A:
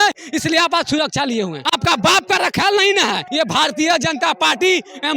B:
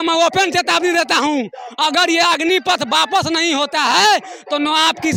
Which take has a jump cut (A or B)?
A